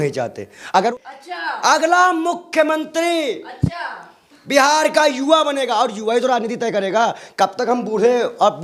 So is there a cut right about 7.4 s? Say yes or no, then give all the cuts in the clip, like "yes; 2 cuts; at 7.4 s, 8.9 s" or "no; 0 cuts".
no; 1 cut; at 0.9 s